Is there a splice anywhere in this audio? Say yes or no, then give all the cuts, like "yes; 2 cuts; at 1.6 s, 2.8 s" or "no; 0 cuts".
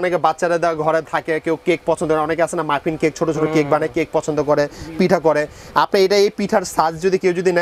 no; 0 cuts